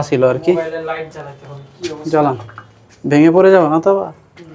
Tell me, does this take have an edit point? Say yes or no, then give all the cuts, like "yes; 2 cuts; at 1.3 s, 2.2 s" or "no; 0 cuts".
no; 0 cuts